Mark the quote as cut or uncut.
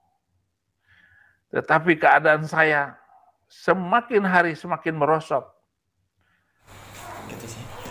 cut